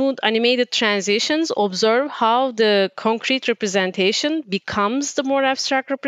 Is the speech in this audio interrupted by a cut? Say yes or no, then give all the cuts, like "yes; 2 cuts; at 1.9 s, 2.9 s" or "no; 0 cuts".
no; 0 cuts